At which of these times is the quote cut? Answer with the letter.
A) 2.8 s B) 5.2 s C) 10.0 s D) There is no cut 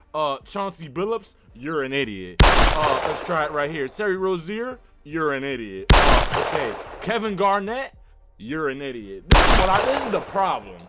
D